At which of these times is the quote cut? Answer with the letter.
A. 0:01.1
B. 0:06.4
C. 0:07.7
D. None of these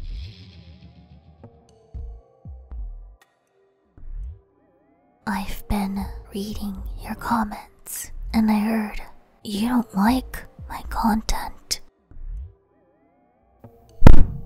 A